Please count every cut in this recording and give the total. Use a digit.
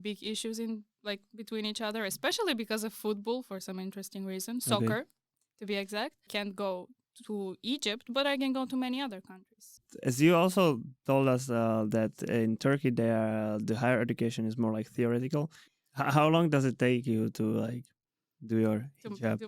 3